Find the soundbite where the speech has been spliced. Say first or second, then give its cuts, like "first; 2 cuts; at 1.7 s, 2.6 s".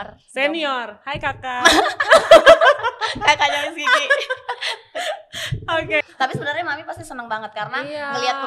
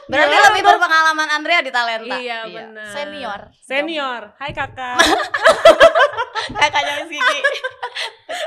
first; 1 cut; at 6.1 s